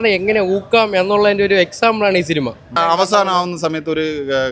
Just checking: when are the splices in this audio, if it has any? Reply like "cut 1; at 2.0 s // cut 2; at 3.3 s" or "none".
cut 1; at 2.8 s